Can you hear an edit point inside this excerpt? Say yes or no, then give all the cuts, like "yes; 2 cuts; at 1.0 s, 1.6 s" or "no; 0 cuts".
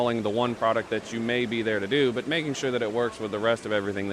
no; 0 cuts